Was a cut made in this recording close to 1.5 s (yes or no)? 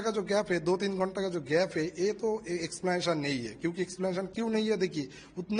no